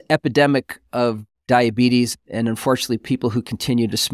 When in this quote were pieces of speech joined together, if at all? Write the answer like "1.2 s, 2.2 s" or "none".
1.3 s

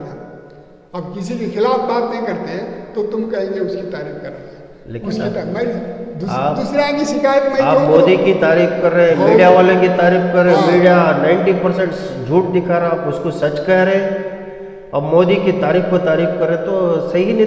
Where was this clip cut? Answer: none

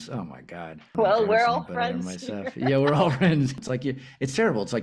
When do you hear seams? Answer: 0.9 s, 3.5 s

